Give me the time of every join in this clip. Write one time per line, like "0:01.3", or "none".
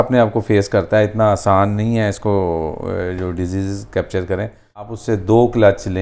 0:04.9

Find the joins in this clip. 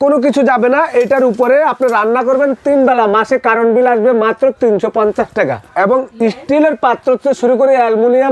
0:05.7

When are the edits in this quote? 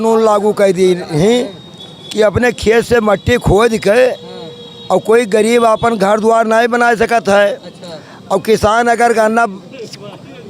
none

